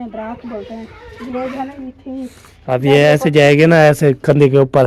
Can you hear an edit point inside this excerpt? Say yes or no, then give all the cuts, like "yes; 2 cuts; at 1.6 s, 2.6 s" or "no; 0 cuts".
yes; 1 cut; at 2.3 s